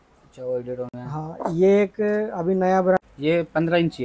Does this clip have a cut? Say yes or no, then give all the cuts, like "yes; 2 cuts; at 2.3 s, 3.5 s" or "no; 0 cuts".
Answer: yes; 1 cut; at 3.0 s